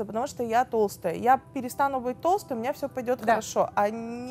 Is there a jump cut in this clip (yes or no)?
no